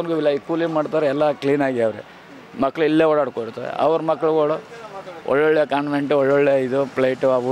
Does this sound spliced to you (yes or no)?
no